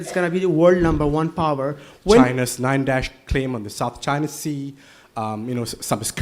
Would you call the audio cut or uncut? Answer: cut